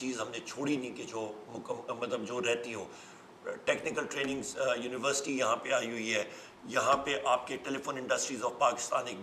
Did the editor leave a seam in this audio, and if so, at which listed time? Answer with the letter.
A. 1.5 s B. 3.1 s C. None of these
C